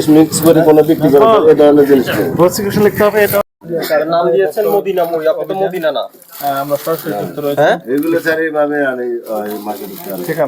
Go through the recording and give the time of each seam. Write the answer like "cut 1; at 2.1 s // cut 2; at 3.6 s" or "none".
cut 1; at 3.5 s